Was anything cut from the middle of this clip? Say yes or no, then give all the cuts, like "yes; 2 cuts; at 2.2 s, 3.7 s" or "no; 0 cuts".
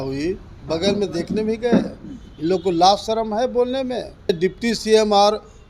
yes; 1 cut; at 4.3 s